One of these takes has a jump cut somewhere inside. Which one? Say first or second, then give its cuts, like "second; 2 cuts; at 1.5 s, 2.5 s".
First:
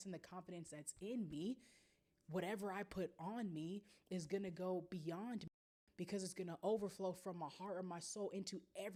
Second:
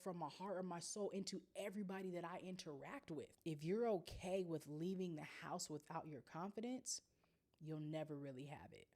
second; 1 cut; at 3.2 s